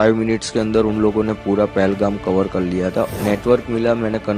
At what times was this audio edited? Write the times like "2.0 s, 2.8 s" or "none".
3.1 s